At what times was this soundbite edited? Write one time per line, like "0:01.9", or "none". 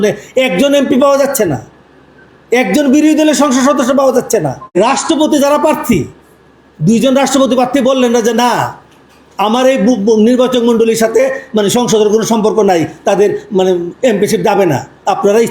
0:04.8